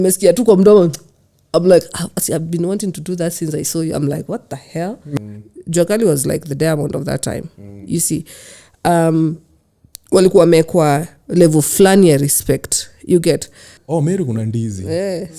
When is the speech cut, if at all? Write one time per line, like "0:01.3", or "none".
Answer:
0:05.1
0:13.7